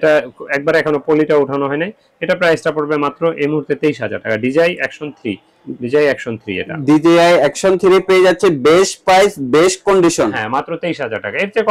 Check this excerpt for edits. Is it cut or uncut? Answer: uncut